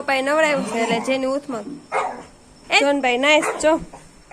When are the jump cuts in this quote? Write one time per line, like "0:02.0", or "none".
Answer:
0:02.8